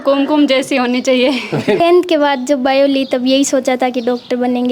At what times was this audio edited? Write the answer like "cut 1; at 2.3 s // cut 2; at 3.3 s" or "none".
cut 1; at 1.8 s

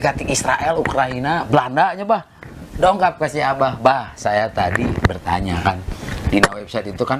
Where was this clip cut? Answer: none

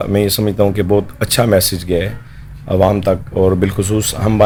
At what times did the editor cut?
none

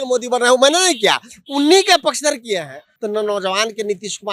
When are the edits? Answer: cut 1; at 2.8 s

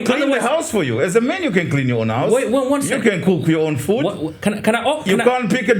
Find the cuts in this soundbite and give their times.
none

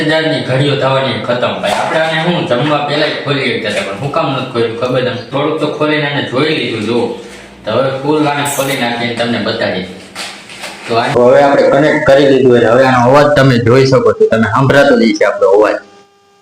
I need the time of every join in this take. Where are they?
cut 1; at 5.3 s // cut 2; at 11.2 s

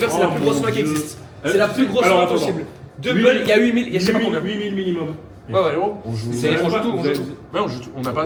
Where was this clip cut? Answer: none

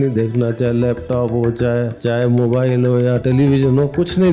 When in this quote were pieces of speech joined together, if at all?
cut 1; at 2.0 s // cut 2; at 3.2 s

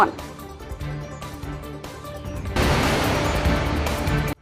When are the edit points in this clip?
none

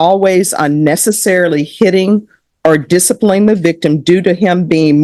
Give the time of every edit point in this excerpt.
none

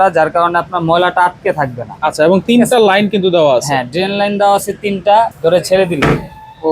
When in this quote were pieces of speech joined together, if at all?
cut 1; at 5.3 s

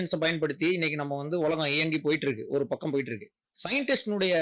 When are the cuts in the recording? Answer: none

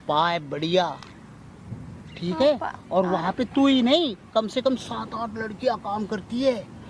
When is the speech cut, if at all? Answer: none

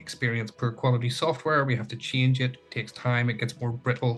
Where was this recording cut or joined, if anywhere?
none

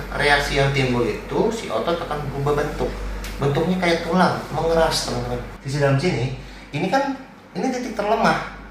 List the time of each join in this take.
cut 1; at 5.6 s

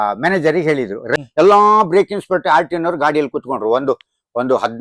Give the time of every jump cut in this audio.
cut 1; at 1.0 s

